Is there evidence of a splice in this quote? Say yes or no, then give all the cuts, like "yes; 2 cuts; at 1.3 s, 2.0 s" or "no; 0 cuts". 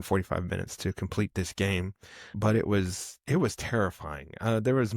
yes; 1 cut; at 2.3 s